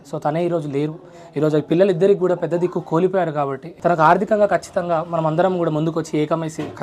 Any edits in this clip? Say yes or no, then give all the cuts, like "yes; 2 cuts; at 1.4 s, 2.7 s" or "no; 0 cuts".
yes; 1 cut; at 3.6 s